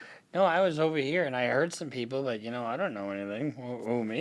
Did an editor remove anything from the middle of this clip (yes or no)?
no